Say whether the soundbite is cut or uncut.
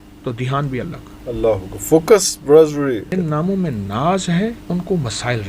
cut